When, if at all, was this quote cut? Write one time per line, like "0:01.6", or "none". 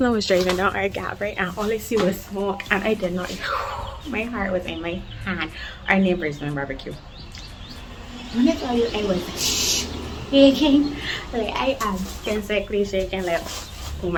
none